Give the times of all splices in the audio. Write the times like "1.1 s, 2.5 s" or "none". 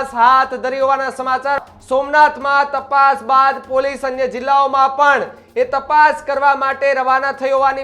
1.6 s